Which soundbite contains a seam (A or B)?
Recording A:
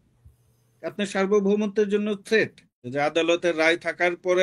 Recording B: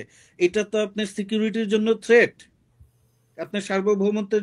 A